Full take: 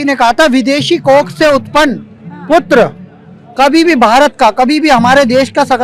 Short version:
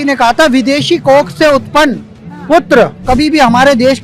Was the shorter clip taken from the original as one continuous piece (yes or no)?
no